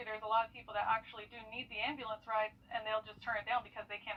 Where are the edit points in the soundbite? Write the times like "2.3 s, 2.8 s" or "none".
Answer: none